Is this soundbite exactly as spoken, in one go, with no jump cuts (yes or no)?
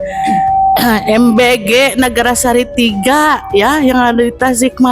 yes